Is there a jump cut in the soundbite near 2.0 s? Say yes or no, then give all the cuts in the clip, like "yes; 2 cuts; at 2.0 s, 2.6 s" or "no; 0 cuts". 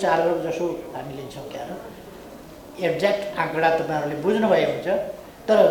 no; 0 cuts